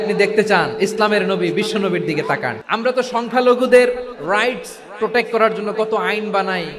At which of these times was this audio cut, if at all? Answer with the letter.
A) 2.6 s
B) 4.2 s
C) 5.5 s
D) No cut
A